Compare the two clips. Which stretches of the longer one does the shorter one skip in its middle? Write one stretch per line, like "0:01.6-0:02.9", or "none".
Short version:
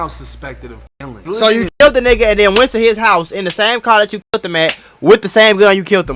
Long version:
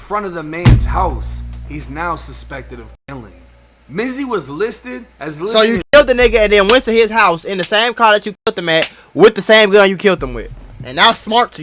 0:03.3-0:05.3